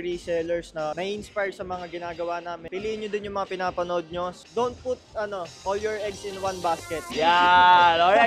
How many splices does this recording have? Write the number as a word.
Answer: one